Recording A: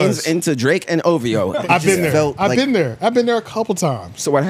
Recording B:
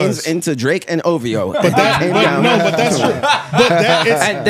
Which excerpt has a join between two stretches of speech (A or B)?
A